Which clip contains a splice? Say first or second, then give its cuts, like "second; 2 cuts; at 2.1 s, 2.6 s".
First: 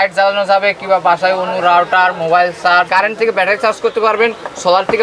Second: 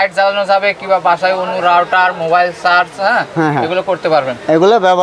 first; 1 cut; at 2.9 s